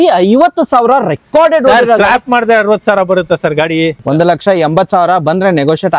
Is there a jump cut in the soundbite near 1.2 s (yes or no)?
no